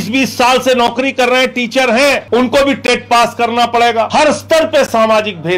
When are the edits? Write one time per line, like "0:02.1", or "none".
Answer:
0:02.2
0:04.1